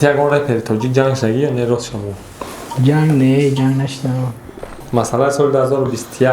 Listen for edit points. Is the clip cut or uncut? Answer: cut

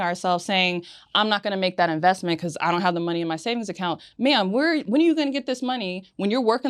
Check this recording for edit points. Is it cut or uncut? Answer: uncut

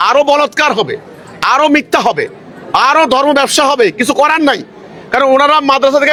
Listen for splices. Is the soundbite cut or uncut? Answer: uncut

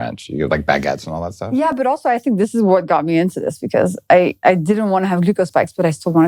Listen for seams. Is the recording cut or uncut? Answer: uncut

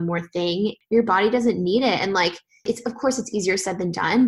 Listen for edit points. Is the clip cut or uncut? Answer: cut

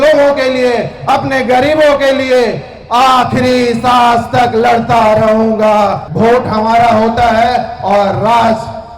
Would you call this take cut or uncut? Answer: cut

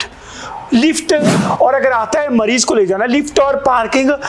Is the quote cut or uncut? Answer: cut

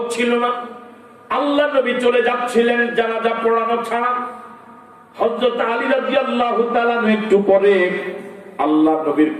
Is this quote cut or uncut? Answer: uncut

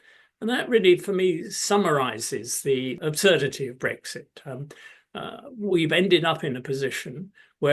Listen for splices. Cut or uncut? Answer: cut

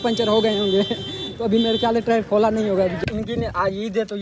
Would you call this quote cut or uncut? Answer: cut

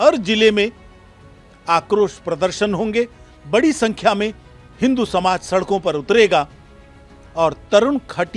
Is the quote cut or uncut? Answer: uncut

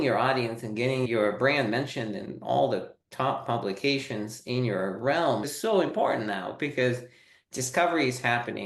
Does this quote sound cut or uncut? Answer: cut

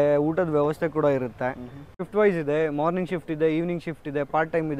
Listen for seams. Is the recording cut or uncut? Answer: cut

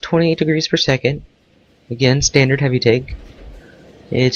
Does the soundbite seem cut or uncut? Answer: uncut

